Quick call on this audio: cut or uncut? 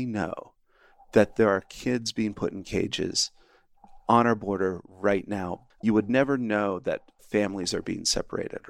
cut